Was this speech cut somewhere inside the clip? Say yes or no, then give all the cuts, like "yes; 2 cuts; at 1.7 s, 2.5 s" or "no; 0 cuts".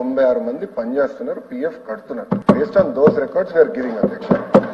yes; 1 cut; at 2.4 s